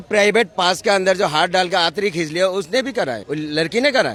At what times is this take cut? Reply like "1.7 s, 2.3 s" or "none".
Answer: none